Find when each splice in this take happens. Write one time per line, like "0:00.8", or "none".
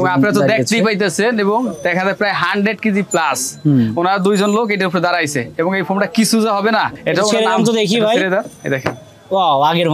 none